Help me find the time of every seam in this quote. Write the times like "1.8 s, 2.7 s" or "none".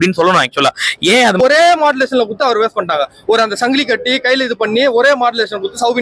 1.4 s